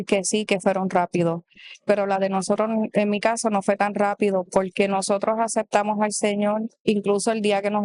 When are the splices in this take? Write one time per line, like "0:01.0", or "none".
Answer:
0:06.7